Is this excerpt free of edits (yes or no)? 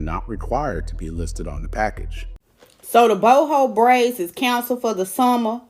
no